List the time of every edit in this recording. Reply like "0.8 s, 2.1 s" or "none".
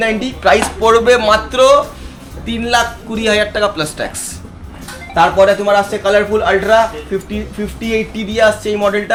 none